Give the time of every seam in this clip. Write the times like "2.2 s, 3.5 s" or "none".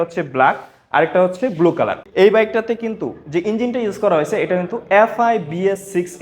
2.0 s